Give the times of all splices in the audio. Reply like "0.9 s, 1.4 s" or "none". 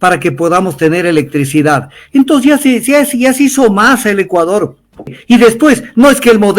5.2 s